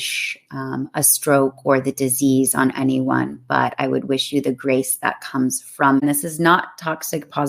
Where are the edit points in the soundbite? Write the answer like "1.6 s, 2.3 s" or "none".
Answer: 6.0 s